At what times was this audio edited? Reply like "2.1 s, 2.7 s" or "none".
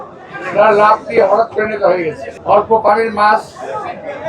2.3 s